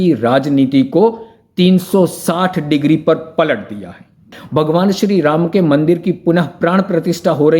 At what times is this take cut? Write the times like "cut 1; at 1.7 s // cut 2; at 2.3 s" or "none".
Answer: cut 1; at 4.4 s